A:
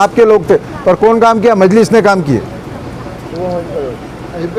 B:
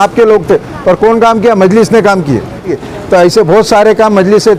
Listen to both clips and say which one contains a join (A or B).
B